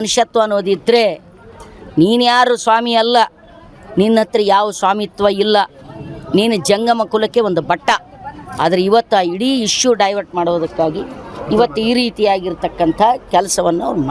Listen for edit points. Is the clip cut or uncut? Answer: uncut